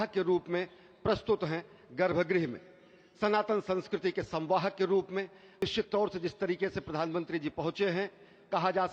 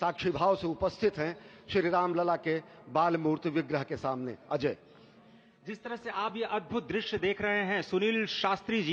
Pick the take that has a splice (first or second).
first